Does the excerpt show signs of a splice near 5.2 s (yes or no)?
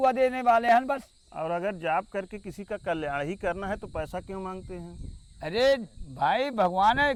no